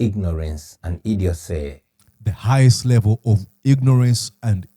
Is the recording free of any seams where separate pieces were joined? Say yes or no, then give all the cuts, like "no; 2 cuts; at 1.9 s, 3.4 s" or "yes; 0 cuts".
no; 1 cut; at 1.9 s